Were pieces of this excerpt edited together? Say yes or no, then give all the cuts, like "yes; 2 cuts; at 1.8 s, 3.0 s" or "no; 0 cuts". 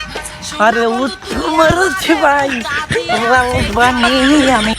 no; 0 cuts